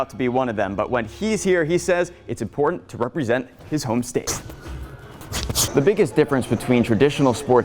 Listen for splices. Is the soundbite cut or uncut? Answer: cut